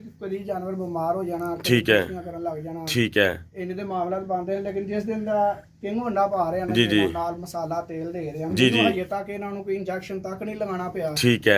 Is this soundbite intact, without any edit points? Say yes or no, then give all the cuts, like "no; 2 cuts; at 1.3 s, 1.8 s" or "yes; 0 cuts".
yes; 0 cuts